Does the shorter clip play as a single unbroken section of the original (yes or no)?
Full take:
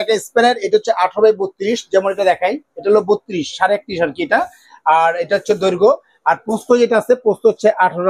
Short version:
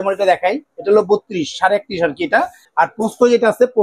no